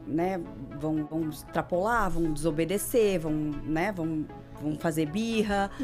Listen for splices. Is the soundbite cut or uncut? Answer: cut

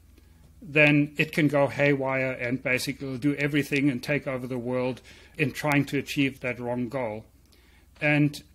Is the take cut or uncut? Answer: cut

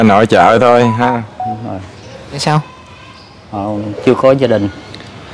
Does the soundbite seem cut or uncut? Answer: cut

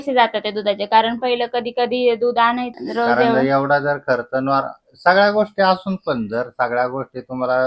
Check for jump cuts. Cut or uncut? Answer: cut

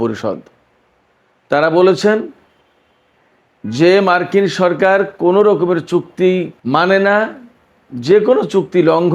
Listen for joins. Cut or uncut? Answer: uncut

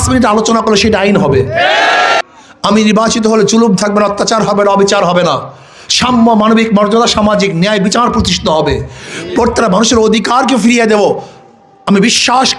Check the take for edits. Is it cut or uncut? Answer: cut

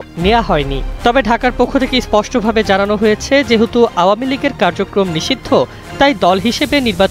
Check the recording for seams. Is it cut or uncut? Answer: uncut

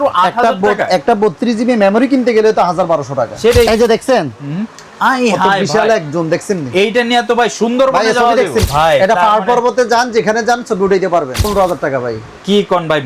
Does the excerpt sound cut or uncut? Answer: cut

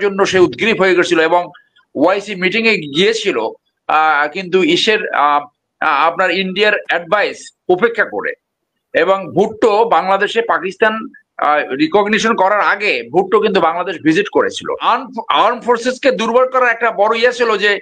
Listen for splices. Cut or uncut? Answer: cut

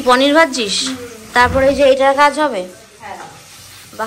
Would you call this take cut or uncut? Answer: uncut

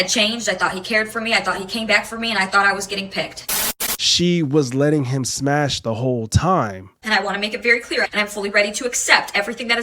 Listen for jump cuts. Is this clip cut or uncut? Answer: cut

